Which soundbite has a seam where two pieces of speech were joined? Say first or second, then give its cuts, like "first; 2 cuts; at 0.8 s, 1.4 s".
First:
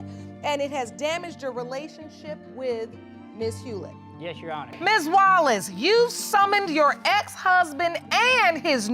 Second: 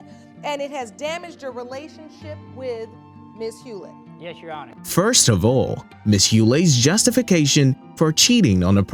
first; 1 cut; at 4.7 s